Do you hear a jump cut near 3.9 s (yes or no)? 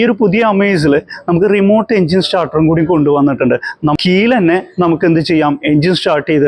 yes